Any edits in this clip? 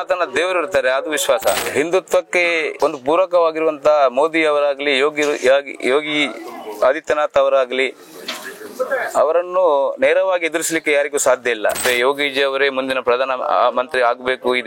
yes; 3 cuts; at 1.6 s, 2.7 s, 11.8 s

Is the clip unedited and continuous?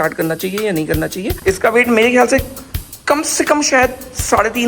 no; 1 cut; at 1.3 s

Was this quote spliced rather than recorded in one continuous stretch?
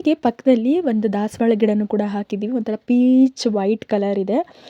no; 0 cuts

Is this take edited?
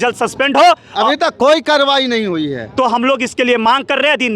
no; 0 cuts

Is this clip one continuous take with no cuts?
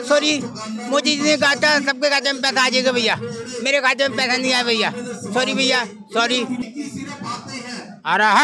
no; 1 cut; at 6.6 s

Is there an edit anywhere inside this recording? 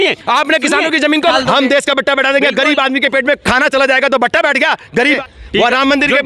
yes; 2 cuts; at 1.3 s, 5.2 s

